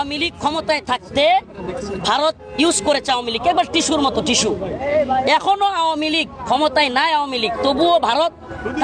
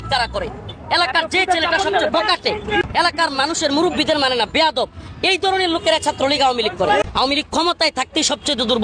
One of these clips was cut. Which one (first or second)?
second